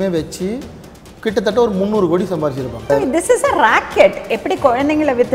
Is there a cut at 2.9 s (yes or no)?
yes